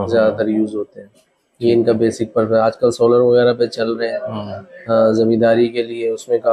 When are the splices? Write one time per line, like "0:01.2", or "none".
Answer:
none